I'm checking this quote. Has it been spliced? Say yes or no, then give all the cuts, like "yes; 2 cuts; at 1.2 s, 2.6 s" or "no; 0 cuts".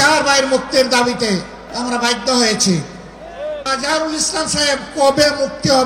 yes; 2 cuts; at 1.6 s, 3.7 s